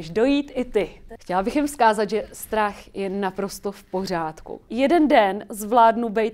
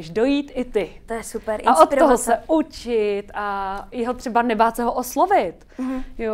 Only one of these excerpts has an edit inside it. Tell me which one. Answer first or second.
first